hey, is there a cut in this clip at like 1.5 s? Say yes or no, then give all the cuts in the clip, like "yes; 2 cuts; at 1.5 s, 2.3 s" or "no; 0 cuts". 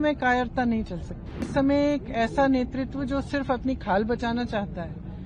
yes; 1 cut; at 1.5 s